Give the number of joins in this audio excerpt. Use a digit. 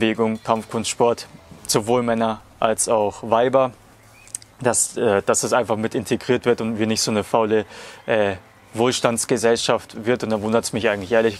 0